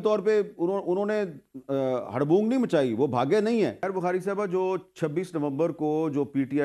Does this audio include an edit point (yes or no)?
yes